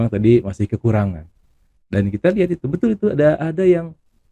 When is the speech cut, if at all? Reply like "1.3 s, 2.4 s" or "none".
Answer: none